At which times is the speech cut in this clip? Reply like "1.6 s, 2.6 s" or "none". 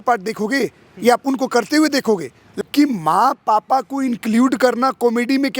2.4 s